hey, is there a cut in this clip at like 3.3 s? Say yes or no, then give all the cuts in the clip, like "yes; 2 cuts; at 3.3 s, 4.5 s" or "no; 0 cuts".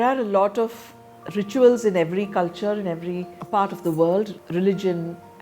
yes; 1 cut; at 3.3 s